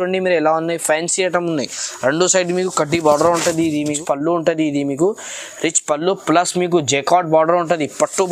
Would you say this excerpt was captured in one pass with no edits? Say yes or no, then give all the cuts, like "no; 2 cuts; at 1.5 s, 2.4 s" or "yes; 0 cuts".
no; 1 cut; at 4.0 s